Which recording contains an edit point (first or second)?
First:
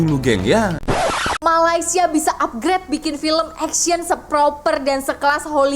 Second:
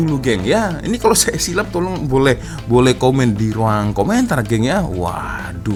first